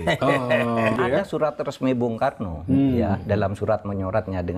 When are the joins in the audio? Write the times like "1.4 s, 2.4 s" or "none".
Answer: 1.0 s